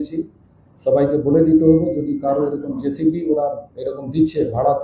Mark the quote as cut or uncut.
uncut